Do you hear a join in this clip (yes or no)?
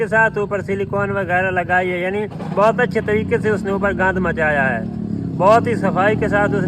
no